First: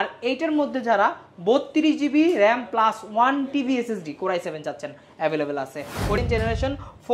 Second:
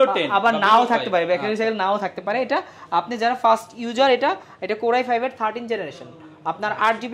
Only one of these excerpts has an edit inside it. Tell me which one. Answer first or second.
first